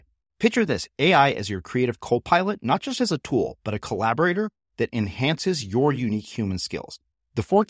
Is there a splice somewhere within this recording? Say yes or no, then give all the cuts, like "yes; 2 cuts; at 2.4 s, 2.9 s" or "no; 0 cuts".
no; 0 cuts